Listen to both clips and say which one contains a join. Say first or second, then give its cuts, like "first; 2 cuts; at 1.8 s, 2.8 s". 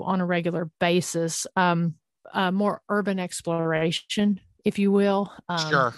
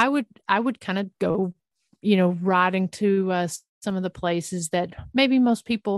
first; 1 cut; at 2.2 s